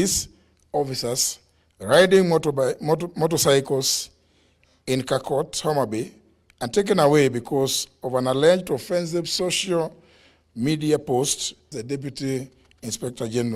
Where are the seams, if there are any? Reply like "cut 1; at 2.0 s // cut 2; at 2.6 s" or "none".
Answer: cut 1; at 11.7 s